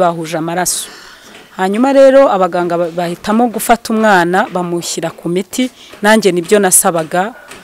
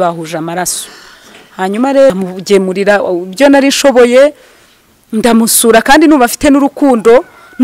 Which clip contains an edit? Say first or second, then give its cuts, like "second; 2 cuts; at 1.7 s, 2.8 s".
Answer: second; 1 cut; at 2.1 s